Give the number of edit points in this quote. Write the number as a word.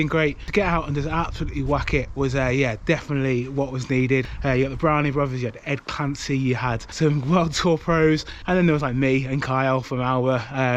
three